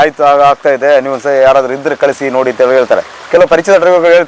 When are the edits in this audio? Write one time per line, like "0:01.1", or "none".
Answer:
none